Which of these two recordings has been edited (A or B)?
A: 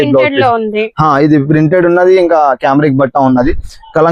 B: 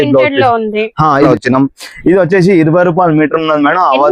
B